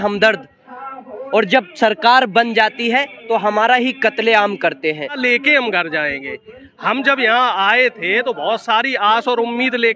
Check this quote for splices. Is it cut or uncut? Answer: cut